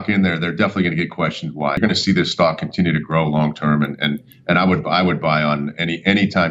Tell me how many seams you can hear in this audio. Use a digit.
1